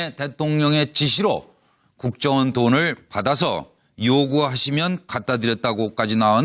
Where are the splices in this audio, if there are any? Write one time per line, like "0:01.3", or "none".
none